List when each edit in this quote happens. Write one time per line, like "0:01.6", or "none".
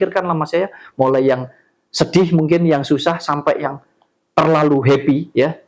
none